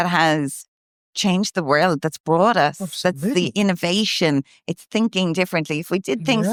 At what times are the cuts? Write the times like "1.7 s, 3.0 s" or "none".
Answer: none